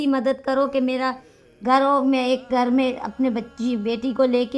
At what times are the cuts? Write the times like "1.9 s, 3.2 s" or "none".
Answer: none